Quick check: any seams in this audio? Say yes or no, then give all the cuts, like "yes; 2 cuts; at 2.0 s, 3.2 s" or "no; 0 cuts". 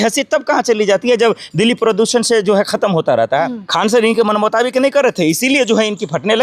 yes; 1 cut; at 3.6 s